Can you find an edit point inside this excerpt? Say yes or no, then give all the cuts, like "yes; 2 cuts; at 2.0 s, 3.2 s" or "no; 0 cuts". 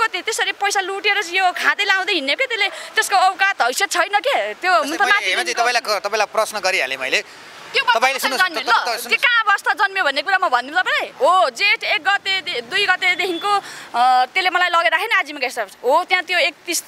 no; 0 cuts